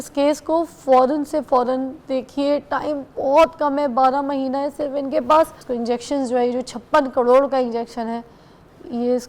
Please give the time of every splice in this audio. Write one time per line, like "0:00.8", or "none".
0:05.6